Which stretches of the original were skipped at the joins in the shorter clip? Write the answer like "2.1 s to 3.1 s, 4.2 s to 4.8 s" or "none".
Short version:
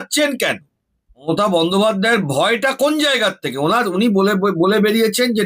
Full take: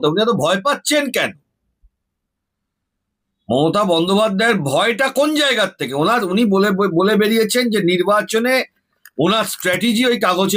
2.0 s to 3.6 s

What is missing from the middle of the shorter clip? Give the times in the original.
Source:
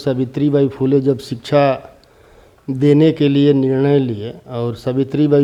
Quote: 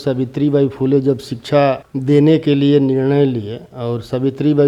1.9 s to 2.6 s

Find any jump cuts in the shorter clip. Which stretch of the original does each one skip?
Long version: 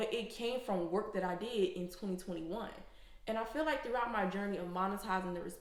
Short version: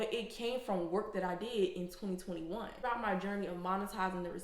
2.8 s to 3.9 s

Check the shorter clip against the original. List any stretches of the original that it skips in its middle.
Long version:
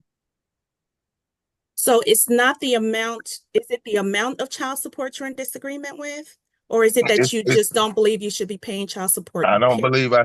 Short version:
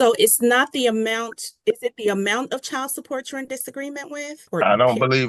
6.3 s to 9.2 s

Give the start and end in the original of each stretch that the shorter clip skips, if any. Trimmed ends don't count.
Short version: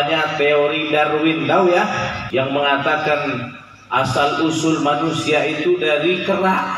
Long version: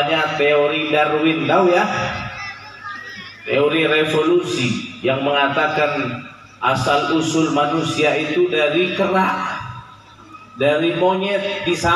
2.2 s to 4.9 s

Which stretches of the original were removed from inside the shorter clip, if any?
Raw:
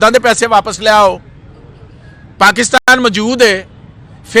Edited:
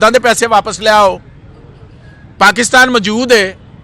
2.8 s to 2.9 s

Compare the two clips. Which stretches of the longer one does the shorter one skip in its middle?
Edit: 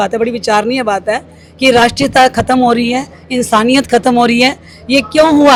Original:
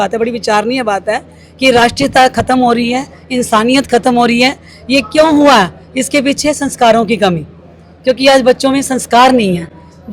none

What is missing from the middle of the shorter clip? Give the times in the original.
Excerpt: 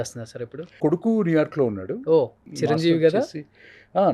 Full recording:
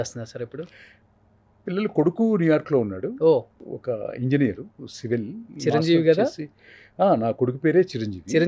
0.8 s to 1.9 s, 3.6 s to 5.5 s

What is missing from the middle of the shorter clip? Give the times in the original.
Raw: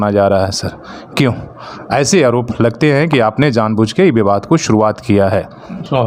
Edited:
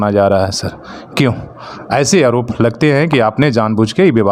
none

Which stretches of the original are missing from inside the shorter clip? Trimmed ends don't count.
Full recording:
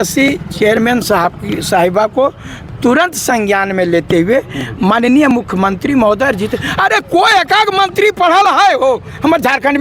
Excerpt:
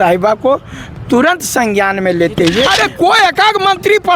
4.4 s to 6.8 s

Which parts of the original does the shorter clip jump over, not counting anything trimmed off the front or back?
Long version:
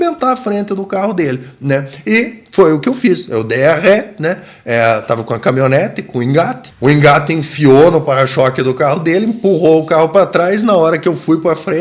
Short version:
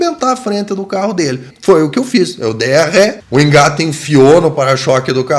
1.5 s to 2.4 s, 4.1 s to 6.7 s

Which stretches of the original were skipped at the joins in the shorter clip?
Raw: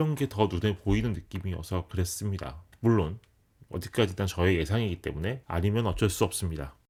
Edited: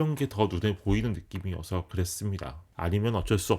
2.7 s to 5.4 s

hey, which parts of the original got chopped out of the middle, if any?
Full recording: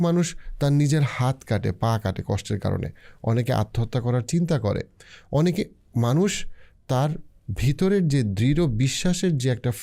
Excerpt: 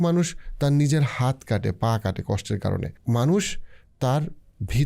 2.9 s to 5.8 s

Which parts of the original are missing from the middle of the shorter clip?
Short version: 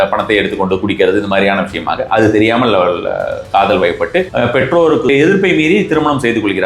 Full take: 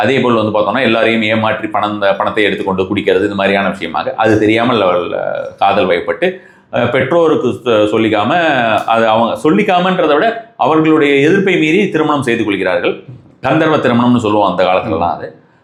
6.4 s to 6.7 s, 7.5 s to 11.1 s

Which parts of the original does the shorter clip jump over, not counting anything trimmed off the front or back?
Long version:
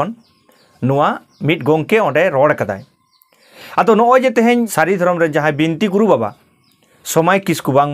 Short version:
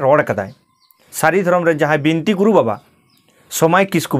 3.5 s to 4.7 s

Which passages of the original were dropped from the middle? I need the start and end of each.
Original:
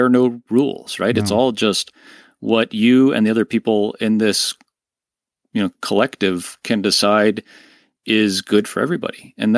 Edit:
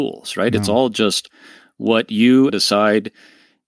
3.1 s to 6.8 s

